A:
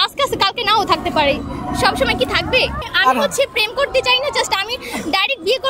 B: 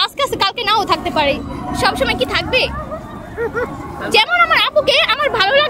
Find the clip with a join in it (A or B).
A